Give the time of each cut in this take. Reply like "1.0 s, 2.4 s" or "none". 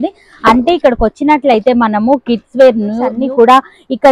3.2 s